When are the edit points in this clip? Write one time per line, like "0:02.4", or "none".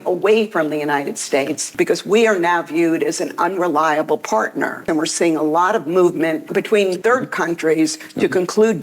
0:01.7
0:04.8
0:06.8